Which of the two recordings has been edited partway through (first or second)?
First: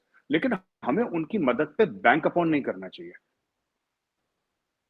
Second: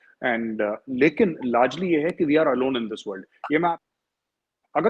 second